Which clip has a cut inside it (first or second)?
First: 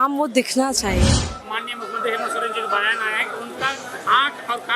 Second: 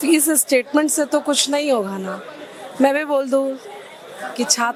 first